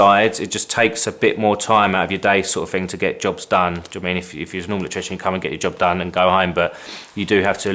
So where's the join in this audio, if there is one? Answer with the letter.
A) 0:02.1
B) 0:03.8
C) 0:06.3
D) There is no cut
D